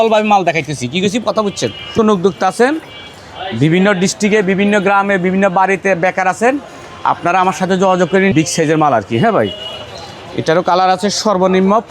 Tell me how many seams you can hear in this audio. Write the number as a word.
two